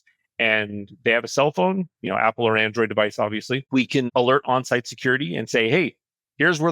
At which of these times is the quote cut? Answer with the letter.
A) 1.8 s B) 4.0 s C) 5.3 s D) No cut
B